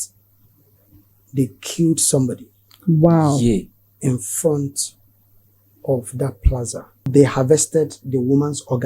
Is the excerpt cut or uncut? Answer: cut